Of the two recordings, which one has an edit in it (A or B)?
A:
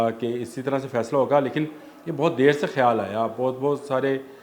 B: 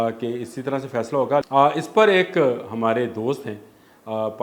B